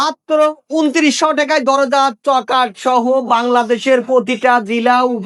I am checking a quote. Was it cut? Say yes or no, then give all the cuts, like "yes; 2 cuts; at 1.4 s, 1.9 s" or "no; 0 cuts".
no; 0 cuts